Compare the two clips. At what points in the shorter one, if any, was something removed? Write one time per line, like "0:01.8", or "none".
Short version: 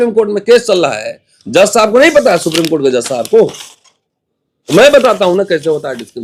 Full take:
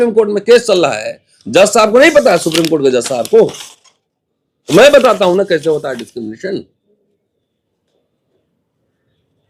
none

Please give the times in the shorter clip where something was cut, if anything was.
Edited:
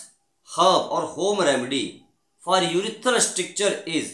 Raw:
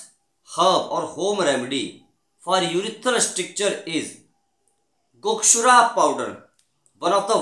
none

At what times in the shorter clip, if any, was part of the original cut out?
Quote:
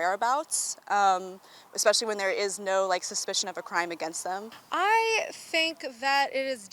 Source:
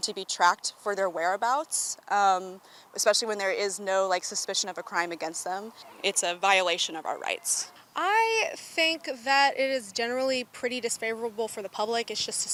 0:04.6

